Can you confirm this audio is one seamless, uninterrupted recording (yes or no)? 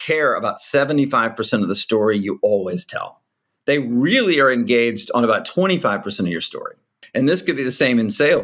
no